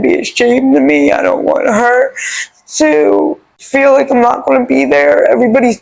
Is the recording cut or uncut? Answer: cut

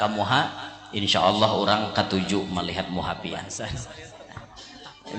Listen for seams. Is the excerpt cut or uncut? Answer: cut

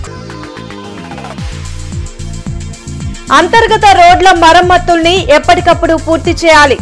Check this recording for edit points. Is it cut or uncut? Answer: cut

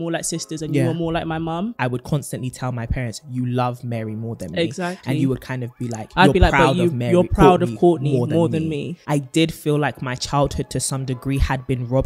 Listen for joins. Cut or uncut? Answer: cut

